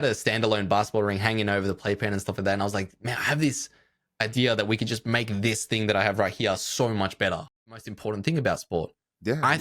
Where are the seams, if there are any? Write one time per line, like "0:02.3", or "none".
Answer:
0:07.9